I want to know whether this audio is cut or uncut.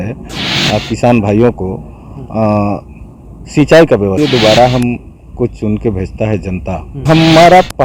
cut